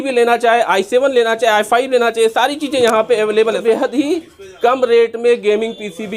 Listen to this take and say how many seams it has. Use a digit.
1